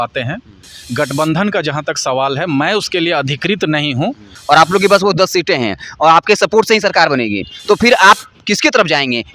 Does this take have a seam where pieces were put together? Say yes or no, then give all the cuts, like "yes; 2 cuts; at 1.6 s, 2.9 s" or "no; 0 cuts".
yes; 1 cut; at 4.3 s